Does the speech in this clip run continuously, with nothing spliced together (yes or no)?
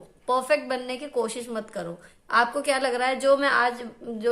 no